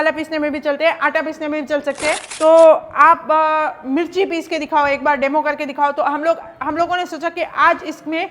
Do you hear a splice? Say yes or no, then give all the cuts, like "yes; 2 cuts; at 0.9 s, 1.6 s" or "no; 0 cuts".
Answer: yes; 1 cut; at 2.3 s